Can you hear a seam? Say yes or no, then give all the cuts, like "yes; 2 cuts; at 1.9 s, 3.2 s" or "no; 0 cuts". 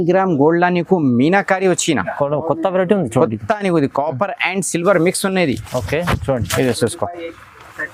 no; 0 cuts